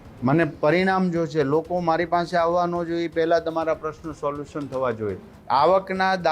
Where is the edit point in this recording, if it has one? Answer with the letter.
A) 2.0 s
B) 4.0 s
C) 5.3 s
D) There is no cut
C